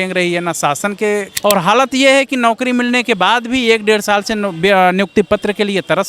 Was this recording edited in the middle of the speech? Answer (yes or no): yes